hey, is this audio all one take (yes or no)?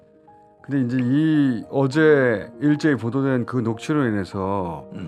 yes